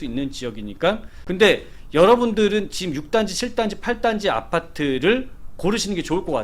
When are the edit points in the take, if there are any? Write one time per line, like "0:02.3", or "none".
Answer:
0:01.2